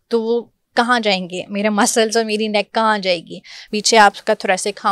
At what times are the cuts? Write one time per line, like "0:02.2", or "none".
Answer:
0:03.6